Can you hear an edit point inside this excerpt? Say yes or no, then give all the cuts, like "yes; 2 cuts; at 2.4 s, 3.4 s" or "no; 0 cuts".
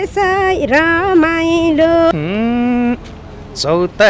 yes; 1 cut; at 2.1 s